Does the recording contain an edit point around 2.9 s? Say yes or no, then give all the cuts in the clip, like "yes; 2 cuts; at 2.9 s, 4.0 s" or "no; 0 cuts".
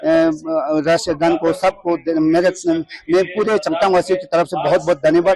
no; 0 cuts